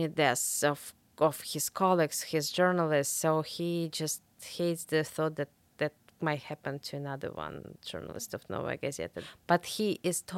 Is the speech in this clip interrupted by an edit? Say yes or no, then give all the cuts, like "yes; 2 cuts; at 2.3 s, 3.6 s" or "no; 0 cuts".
yes; 1 cut; at 9.2 s